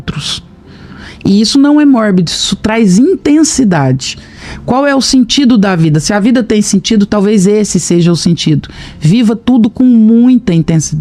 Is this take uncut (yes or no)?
yes